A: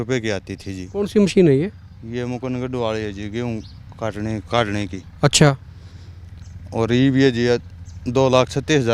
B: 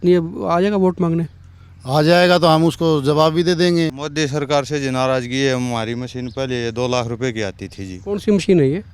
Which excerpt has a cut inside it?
B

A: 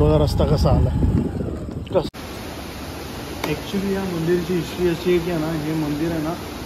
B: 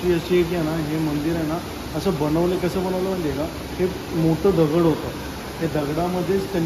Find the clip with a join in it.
A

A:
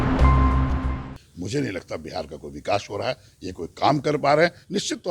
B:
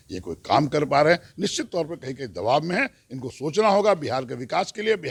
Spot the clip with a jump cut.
A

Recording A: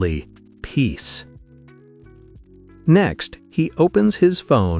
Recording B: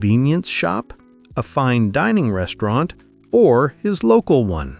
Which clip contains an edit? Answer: A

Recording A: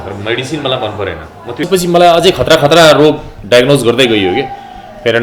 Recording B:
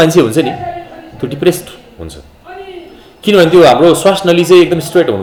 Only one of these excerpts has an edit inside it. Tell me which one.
A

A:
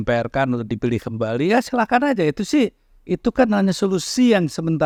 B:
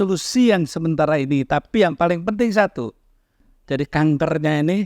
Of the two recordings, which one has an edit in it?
B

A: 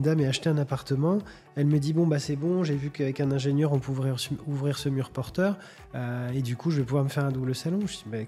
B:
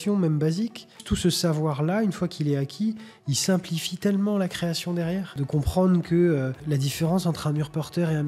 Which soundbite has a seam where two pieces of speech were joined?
B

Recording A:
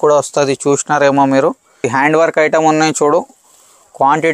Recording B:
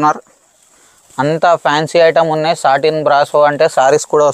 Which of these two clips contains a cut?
A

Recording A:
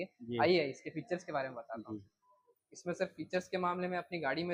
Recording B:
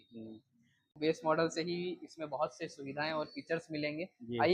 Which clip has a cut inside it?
B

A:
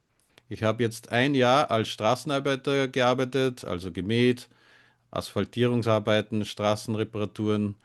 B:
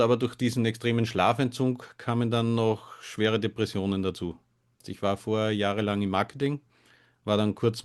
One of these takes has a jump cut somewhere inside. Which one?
B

